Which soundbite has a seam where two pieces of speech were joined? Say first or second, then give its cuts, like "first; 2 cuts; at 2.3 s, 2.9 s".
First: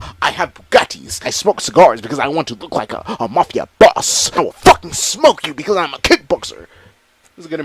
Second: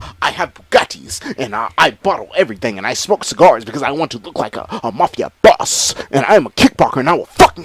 first; 2 cuts; at 1.2 s, 4.4 s